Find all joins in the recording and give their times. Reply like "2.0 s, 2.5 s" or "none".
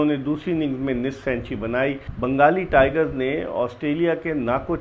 2.1 s